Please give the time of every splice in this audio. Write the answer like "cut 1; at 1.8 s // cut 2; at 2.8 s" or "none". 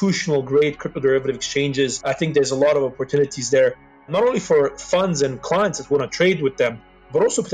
cut 1; at 2.0 s